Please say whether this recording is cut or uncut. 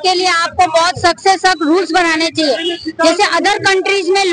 uncut